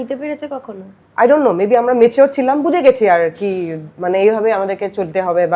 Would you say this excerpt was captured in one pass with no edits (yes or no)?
yes